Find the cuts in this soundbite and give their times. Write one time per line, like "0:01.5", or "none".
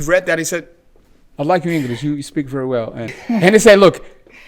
0:03.2